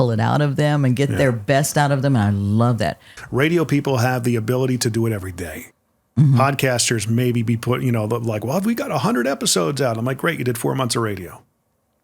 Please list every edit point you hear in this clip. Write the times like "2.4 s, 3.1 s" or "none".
3.1 s